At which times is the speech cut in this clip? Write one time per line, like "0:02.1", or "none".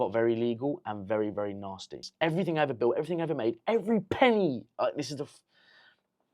0:02.0